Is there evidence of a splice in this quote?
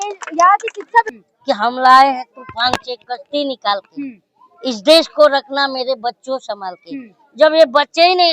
yes; 1 cut; at 1.1 s

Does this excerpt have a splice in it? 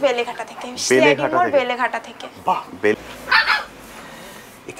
yes; 1 cut; at 2.9 s

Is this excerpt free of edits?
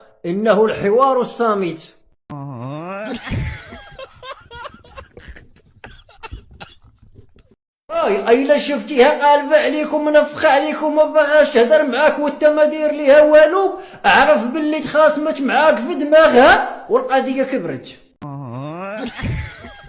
no; 3 cuts; at 2.1 s, 7.9 s, 18.0 s

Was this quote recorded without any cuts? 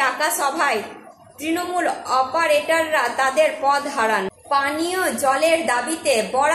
no; 1 cut; at 4.4 s

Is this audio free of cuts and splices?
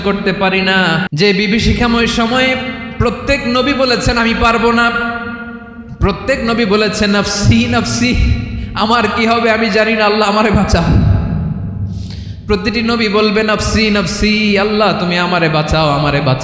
no; 1 cut; at 1.1 s

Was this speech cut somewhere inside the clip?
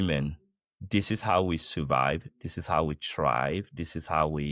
no; 0 cuts

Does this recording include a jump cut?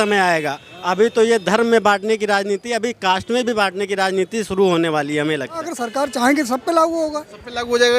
yes; 1 cut; at 5.7 s

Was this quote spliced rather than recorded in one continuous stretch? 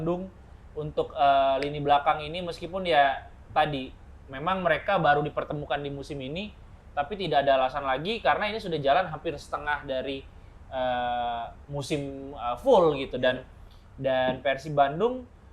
no; 0 cuts

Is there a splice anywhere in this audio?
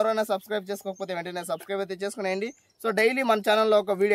no; 0 cuts

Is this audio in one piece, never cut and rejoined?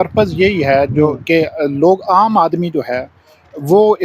yes; 0 cuts

